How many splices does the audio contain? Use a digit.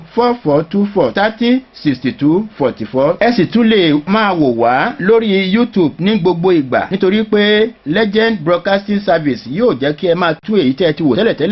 1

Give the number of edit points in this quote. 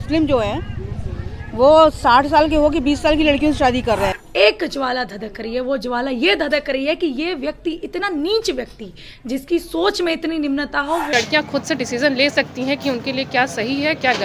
2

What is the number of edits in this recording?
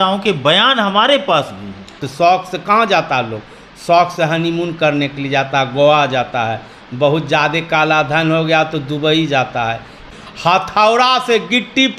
2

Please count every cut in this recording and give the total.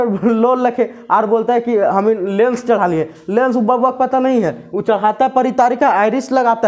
0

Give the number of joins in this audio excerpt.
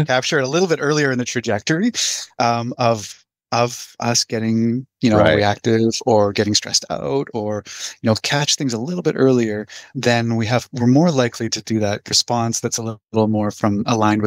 2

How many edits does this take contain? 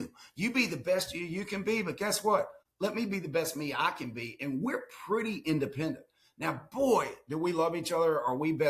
1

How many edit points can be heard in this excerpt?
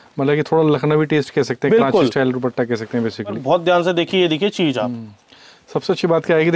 1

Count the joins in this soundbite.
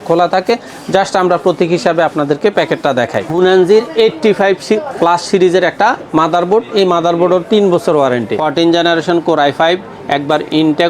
2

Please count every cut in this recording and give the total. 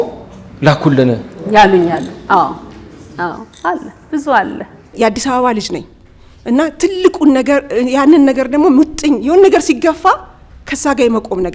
1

